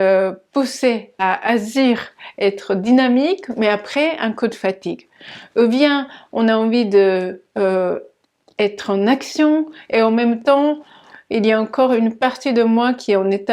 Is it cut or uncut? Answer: uncut